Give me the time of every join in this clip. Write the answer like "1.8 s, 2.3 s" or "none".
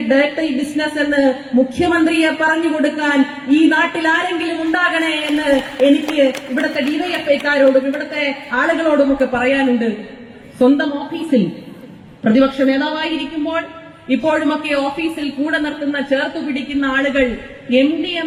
none